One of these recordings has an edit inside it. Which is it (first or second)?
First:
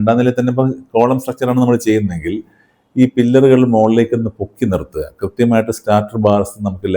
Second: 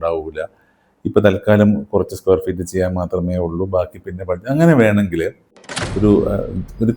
second